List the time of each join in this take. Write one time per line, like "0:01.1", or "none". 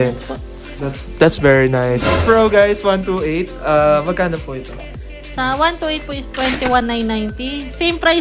0:02.2